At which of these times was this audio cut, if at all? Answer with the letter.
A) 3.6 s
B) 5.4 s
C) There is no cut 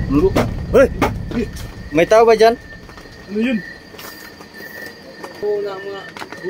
B